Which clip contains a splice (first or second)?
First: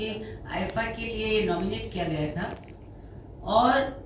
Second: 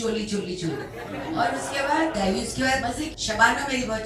second